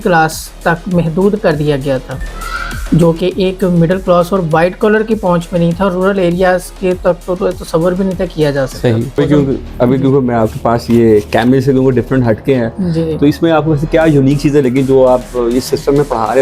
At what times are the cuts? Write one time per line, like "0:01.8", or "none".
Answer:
0:09.2